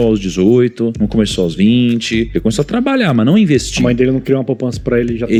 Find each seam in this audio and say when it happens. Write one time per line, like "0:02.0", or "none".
none